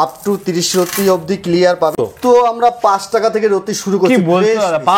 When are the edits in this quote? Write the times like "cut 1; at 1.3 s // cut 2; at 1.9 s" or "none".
cut 1; at 1.9 s